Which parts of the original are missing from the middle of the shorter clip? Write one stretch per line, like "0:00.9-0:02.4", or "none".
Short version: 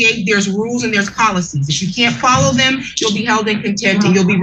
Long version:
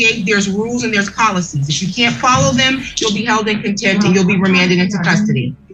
none